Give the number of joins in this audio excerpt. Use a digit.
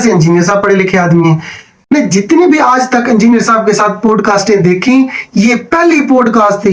1